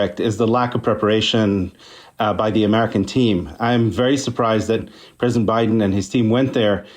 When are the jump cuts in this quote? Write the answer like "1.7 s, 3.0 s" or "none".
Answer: 4.9 s